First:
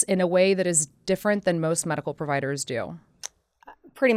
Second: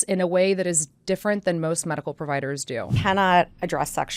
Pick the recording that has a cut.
second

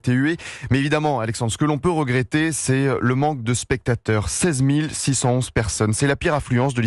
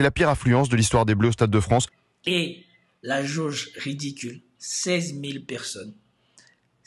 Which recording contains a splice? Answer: second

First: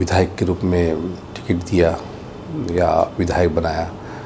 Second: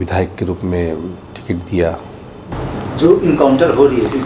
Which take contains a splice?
second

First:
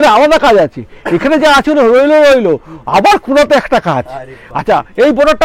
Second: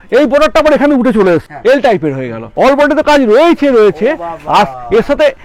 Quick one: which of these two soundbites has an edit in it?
second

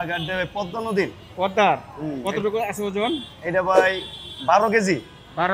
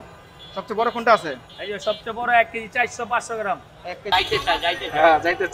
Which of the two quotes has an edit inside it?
second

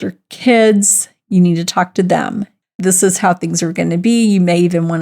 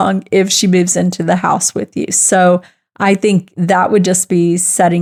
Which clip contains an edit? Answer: first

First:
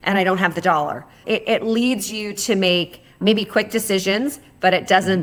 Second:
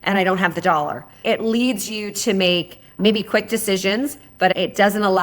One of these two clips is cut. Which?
second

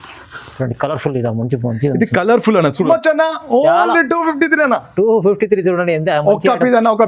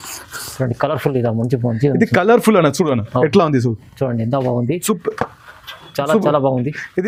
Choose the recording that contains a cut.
first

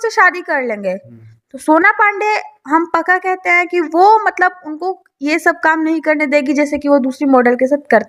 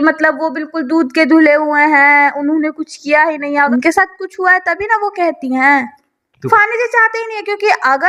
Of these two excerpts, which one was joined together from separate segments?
second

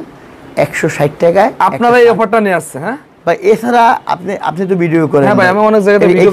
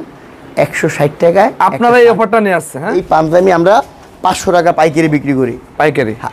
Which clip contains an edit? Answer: second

